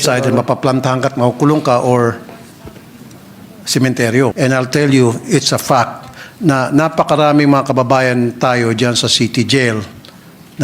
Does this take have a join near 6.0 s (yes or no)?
no